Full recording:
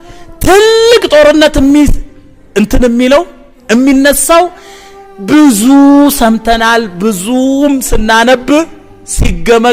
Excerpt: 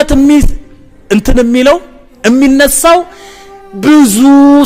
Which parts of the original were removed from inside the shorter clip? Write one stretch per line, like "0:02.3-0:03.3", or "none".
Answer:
none